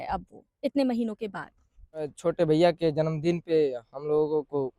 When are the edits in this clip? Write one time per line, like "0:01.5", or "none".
0:02.1